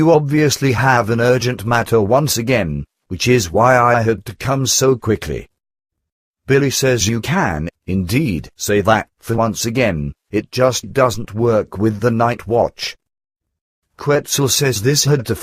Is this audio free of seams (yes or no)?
yes